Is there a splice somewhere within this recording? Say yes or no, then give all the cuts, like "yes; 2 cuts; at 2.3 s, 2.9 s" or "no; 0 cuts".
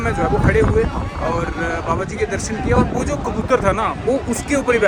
no; 0 cuts